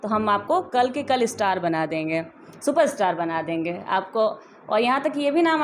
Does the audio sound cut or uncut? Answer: uncut